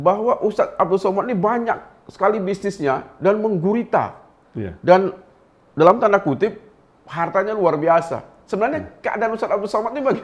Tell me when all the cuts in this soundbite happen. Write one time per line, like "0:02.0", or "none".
none

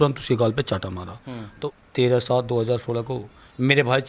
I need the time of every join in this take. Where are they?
0:01.5

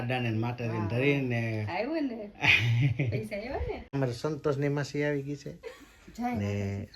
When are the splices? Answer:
0:03.9

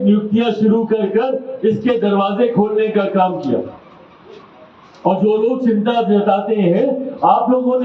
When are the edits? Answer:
none

